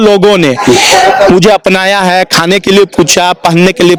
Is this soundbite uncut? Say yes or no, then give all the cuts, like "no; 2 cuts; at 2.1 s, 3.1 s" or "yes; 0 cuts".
yes; 0 cuts